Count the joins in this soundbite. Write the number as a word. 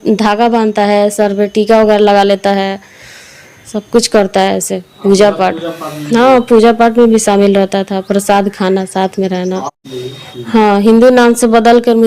one